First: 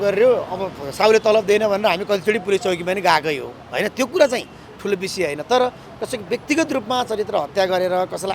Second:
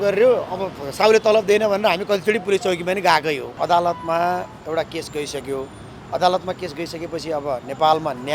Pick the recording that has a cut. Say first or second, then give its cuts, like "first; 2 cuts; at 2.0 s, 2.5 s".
second; 1 cut; at 3.5 s